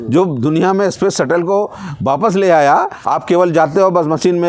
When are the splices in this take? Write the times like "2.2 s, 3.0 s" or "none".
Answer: 3.0 s